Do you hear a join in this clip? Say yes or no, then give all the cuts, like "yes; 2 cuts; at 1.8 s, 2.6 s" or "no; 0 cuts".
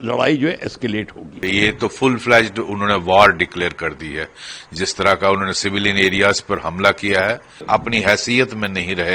yes; 2 cuts; at 1.4 s, 7.6 s